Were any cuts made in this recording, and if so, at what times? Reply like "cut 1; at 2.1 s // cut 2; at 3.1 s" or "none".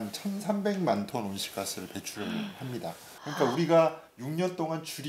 cut 1; at 3.1 s